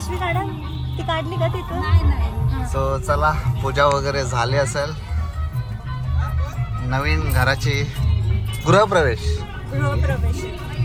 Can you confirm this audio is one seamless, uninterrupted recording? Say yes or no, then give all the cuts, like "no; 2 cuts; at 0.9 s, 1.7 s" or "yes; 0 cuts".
yes; 0 cuts